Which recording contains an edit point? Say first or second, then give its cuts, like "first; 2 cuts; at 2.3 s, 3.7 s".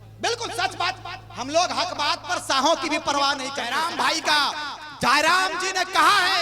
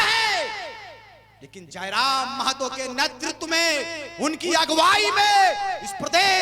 first; 1 cut; at 3.6 s